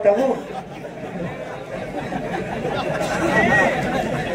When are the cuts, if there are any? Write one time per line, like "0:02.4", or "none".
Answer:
none